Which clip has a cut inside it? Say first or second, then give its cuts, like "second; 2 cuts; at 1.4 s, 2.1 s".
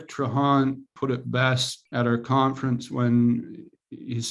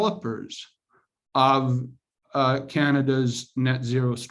first; 2 cuts; at 0.9 s, 1.7 s